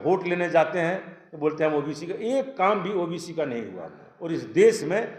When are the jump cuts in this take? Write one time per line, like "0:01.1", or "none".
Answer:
0:04.1

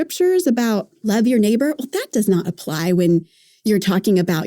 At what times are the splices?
0:01.1
0:03.5

